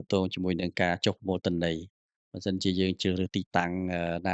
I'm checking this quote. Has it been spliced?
no; 0 cuts

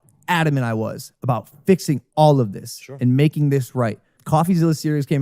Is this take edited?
yes; 1 cut; at 4.2 s

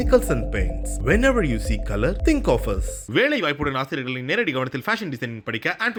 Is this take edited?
no; 0 cuts

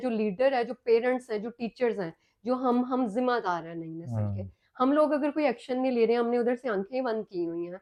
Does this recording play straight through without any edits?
yes; 0 cuts

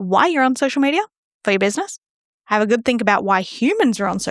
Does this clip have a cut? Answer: yes; 1 cut; at 1.2 s

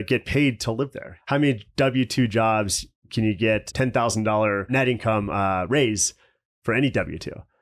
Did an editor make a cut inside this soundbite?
yes; 3 cuts; at 1.1 s, 3.7 s, 4.7 s

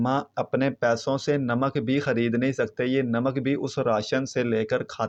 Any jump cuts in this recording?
no; 0 cuts

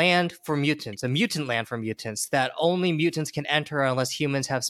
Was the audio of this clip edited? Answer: no; 0 cuts

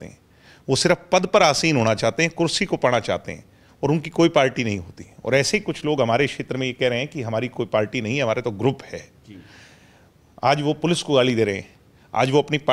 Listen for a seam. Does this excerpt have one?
no; 0 cuts

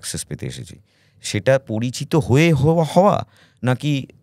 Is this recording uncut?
yes; 0 cuts

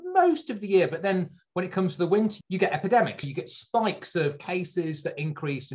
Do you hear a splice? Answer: yes; 1 cut; at 2.4 s

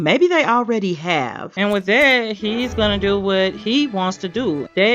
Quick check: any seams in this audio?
yes; 1 cut; at 1.5 s

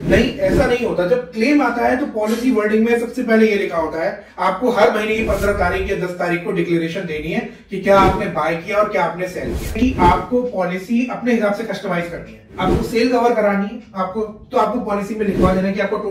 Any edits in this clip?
yes; 1 cut; at 9.7 s

